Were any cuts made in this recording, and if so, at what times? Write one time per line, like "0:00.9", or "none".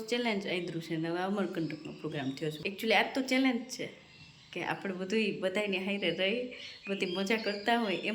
0:02.6

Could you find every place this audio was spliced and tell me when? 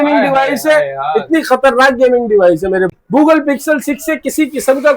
0:02.9

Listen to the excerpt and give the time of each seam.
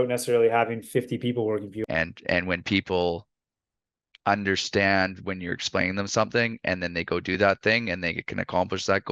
0:01.7

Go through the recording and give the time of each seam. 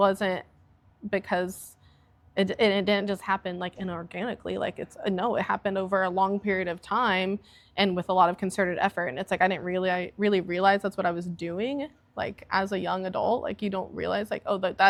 none

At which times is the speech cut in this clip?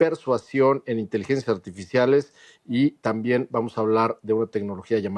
none

